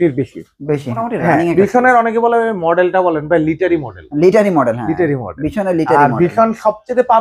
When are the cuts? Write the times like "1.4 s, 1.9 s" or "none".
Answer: 1.0 s